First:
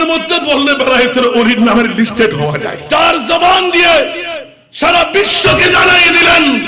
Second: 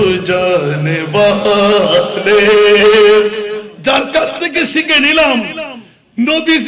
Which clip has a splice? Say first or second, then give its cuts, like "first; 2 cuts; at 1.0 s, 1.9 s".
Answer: first; 1 cut; at 2.7 s